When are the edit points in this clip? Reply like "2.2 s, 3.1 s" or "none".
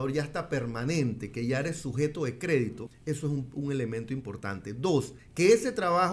2.9 s, 5.2 s